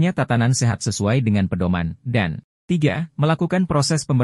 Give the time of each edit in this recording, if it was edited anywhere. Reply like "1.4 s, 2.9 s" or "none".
2.5 s